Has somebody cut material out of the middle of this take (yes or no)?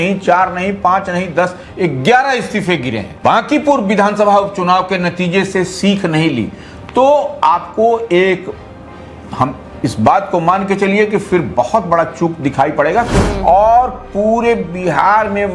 yes